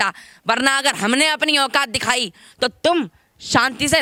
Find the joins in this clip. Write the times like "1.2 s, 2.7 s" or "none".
none